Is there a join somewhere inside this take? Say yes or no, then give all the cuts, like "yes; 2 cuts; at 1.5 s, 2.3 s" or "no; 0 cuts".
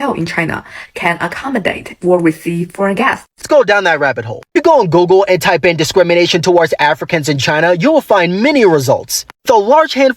yes; 1 cut; at 3.3 s